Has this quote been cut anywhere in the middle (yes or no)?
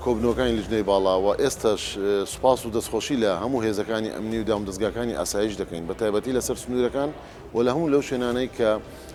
no